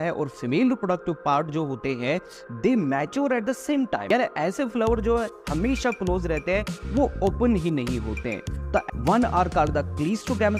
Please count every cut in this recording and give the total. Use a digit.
2